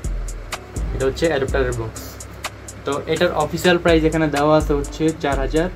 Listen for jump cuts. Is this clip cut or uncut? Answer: uncut